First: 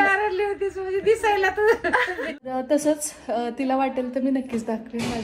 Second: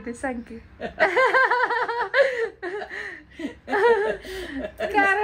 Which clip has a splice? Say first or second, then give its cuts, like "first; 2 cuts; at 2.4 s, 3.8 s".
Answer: first; 1 cut; at 2.4 s